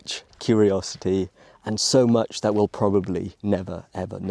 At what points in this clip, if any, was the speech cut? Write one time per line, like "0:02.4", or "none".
none